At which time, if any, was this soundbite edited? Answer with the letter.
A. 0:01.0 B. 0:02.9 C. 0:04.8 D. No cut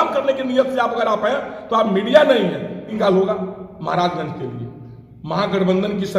B